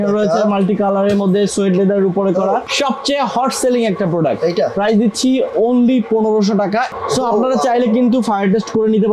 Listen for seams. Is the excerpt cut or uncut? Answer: cut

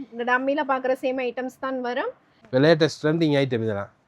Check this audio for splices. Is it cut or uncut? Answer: cut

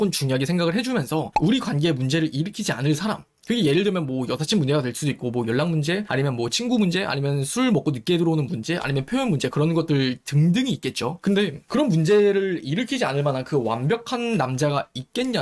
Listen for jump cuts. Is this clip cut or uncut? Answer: uncut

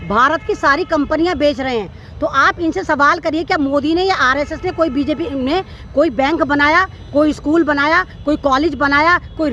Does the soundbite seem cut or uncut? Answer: uncut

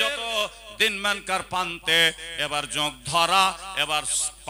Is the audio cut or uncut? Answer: uncut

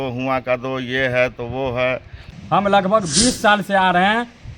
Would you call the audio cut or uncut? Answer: cut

